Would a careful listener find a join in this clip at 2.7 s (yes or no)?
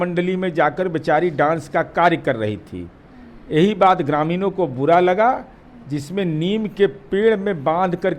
no